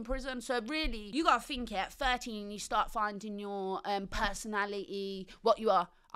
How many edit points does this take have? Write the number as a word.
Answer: one